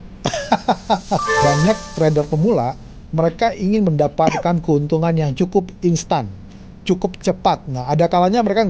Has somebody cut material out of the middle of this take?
yes; 1 cut; at 1.3 s

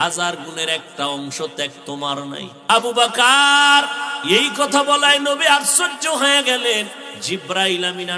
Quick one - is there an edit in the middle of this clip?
yes; 3 cuts; at 2.7 s, 4.1 s, 7.1 s

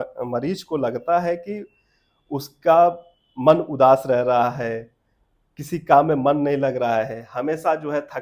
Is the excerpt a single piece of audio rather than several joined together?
yes; 0 cuts

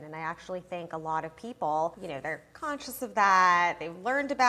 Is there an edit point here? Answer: yes; 1 cut; at 2.1 s

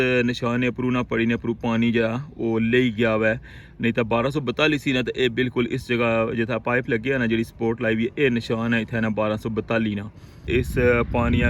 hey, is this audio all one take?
no; 1 cut; at 10.5 s

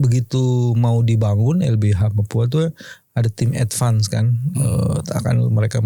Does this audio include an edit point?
no; 0 cuts

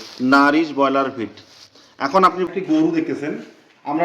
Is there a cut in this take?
yes; 1 cut; at 2.5 s

